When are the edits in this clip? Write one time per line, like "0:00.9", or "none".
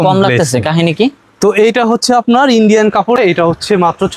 0:03.2